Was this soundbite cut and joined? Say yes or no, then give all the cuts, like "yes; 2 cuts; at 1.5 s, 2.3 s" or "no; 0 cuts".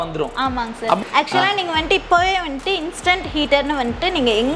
yes; 1 cut; at 1.0 s